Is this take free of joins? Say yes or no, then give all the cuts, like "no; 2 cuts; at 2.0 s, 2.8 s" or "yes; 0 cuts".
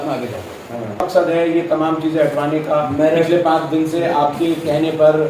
no; 1 cut; at 1.1 s